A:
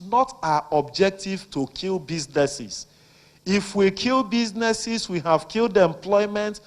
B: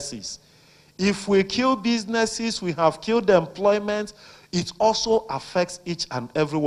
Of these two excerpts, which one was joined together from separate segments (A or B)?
A